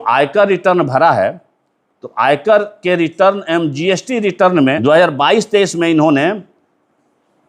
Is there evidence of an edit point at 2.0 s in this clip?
no; 1 cut; at 4.8 s

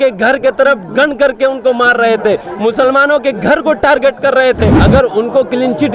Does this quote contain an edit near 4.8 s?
yes; 1 cut; at 4.8 s

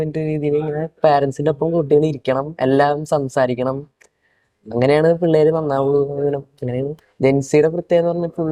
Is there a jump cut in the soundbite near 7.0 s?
yes; 1 cut; at 7.0 s

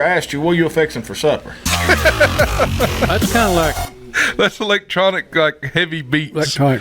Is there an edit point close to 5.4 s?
no; 1 cut; at 1.7 s

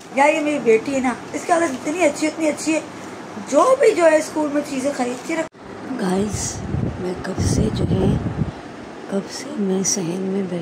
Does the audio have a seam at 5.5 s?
yes; 1 cut; at 5.5 s

